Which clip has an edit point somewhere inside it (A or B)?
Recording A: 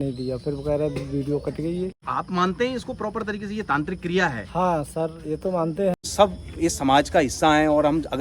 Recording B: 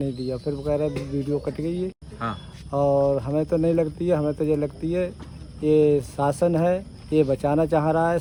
A